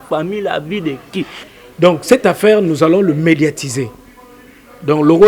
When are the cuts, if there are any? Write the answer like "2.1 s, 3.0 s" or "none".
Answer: 1.4 s